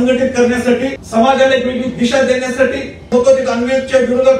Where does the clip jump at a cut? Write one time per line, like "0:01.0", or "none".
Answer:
0:01.0
0:03.1